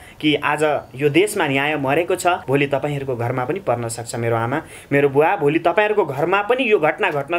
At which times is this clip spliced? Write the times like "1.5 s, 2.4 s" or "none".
2.4 s